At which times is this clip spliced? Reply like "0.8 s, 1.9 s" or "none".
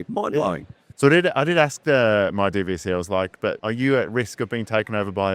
none